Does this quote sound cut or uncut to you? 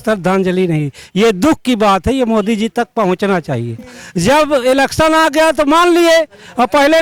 cut